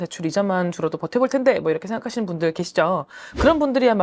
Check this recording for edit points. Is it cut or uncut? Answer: uncut